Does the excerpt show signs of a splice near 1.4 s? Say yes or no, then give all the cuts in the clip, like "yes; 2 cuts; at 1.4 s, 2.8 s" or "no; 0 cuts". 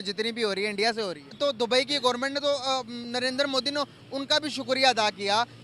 yes; 1 cut; at 1.4 s